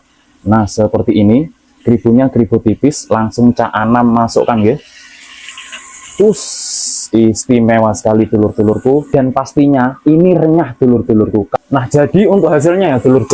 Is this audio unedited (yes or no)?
no